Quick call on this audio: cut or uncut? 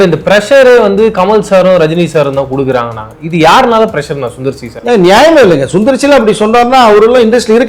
uncut